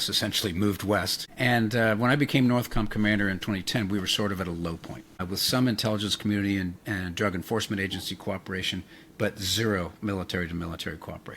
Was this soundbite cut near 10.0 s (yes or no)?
no